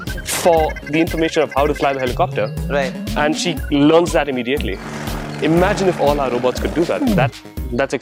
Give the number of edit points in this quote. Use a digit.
0